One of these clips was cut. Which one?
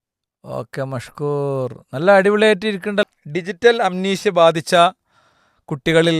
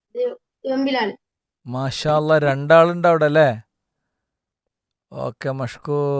first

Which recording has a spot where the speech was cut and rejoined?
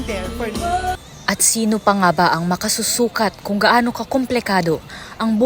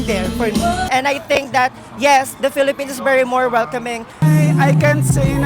second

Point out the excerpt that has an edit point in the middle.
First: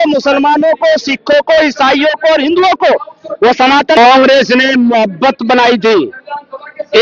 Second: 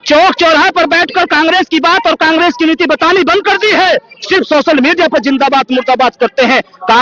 first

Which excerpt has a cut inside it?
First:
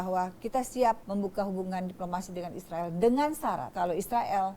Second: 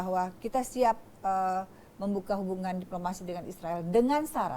first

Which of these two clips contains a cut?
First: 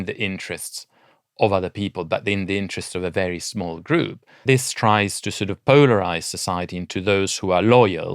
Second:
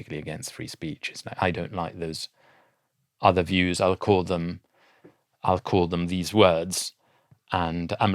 first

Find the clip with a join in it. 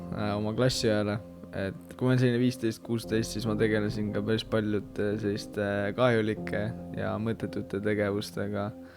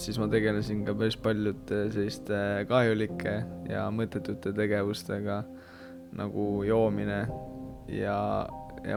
first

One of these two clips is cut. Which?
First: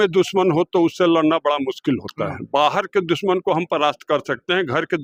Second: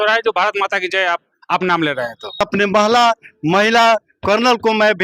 second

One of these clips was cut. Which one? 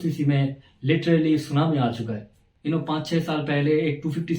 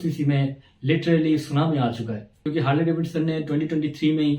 first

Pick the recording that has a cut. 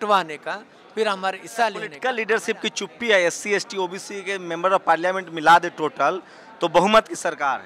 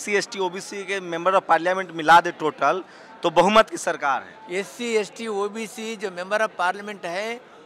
first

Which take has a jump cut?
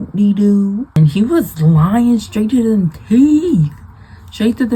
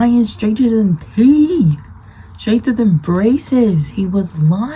first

